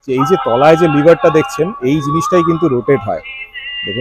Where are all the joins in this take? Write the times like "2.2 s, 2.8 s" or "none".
none